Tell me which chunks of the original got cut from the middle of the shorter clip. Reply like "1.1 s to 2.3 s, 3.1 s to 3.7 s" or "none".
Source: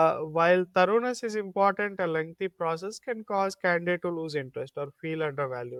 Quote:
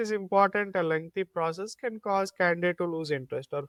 none